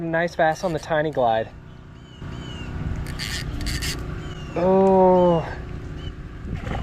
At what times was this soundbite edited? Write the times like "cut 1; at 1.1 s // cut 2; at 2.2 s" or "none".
none